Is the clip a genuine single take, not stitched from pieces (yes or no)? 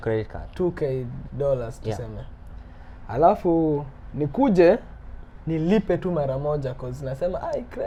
yes